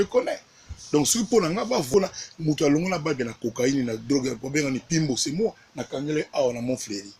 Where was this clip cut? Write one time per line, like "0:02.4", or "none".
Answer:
0:01.9